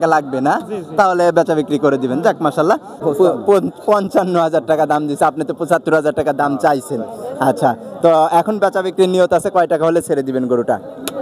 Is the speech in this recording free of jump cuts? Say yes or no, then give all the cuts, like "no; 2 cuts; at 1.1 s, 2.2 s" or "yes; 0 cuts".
no; 1 cut; at 2.9 s